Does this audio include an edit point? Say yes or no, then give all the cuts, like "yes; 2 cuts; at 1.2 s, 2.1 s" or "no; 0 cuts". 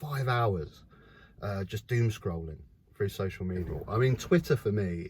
yes; 1 cut; at 3.7 s